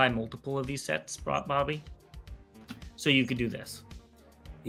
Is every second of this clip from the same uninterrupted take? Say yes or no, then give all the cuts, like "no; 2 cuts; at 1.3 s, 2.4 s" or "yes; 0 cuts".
yes; 0 cuts